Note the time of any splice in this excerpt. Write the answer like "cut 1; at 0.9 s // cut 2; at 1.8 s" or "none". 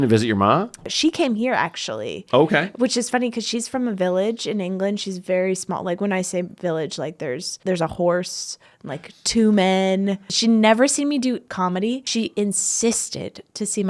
cut 1; at 0.9 s // cut 2; at 7.6 s // cut 3; at 10.3 s // cut 4; at 12.1 s